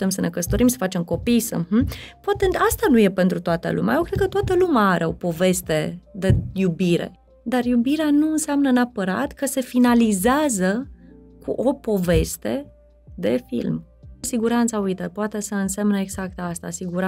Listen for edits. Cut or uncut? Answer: cut